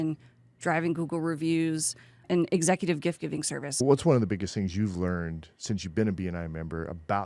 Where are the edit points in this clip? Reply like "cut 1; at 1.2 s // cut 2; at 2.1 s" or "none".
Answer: cut 1; at 3.8 s